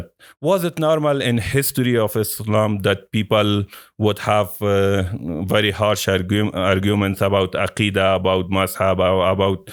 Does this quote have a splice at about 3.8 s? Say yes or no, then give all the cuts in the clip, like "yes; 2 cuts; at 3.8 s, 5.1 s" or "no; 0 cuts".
no; 0 cuts